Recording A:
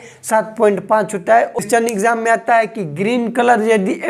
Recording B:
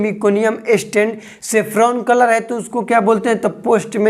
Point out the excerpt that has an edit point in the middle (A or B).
A